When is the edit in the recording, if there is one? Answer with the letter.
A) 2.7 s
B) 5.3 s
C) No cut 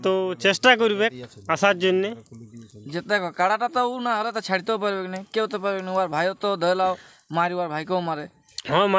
C